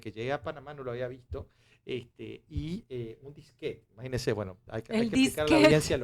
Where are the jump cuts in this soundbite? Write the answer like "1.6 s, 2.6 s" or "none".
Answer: none